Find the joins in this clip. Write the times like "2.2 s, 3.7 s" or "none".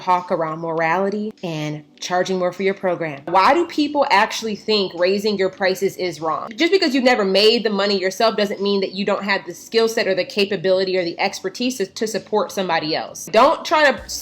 3.3 s, 6.5 s, 13.2 s